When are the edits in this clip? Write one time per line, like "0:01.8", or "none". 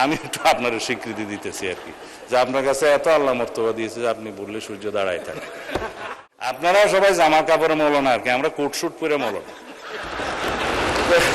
0:06.0